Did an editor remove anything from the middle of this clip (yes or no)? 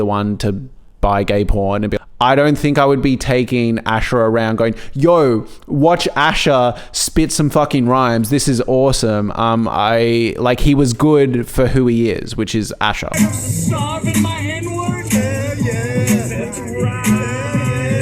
yes